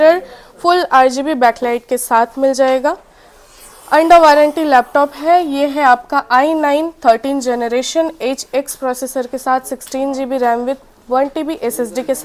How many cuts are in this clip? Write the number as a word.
zero